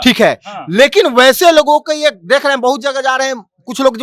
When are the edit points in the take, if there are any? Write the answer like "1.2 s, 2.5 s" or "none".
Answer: none